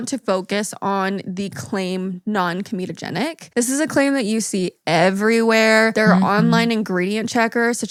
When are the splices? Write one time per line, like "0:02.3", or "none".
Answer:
none

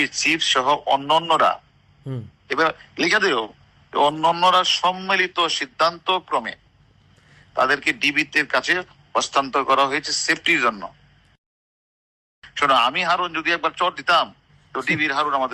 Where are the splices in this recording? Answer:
none

